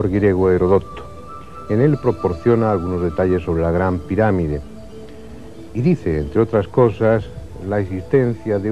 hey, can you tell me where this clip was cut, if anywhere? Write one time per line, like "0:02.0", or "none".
0:05.9